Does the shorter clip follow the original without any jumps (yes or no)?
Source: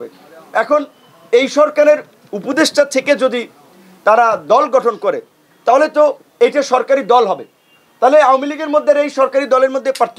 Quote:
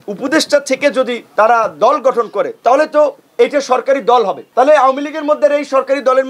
no